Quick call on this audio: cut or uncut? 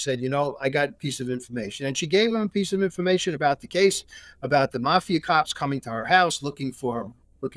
uncut